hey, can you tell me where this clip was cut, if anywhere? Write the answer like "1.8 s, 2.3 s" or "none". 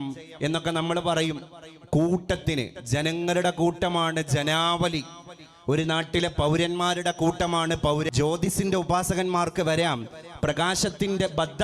8.1 s

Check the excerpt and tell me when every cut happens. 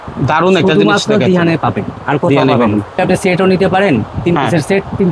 3.0 s

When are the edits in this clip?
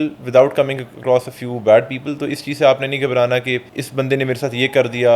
3.8 s

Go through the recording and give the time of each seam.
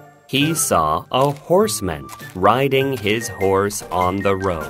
none

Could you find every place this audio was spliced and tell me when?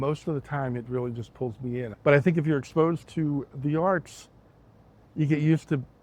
1.9 s

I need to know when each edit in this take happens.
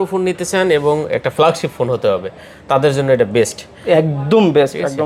none

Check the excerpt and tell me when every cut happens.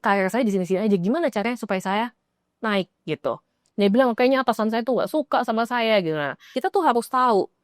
3.5 s, 6.5 s

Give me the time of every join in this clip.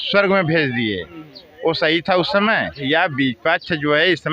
2.8 s

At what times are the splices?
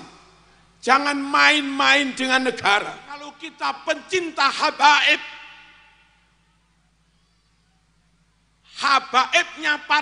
3.4 s

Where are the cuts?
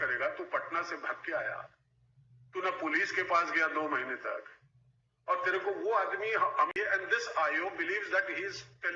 6.7 s

